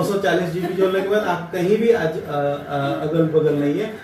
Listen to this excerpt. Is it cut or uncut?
uncut